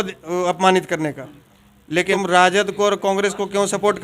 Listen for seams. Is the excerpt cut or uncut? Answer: cut